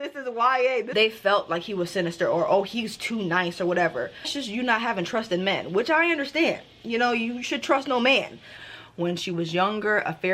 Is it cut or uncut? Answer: cut